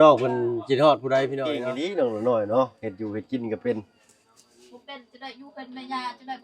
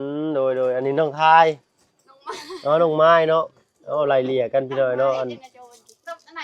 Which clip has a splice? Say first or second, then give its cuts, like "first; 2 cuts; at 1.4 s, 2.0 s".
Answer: first; 1 cut; at 1.6 s